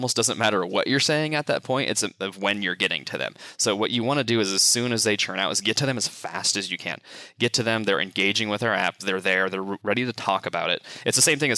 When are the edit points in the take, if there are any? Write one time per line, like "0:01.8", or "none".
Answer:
none